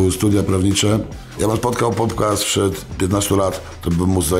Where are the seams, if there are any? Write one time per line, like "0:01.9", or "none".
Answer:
0:01.2
0:02.9